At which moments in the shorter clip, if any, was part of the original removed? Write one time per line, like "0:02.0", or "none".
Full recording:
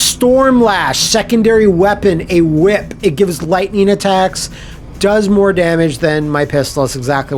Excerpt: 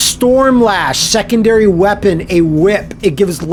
none